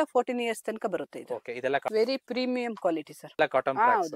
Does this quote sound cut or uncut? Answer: cut